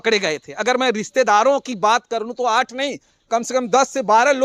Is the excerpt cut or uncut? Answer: uncut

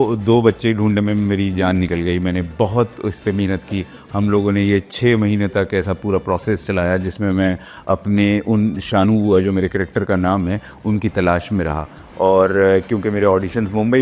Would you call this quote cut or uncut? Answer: uncut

